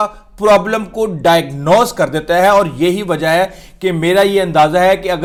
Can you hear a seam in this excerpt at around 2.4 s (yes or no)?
no